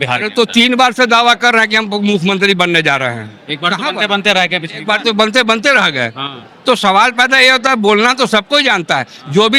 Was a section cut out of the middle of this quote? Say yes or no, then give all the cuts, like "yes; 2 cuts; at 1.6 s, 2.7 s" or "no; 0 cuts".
no; 0 cuts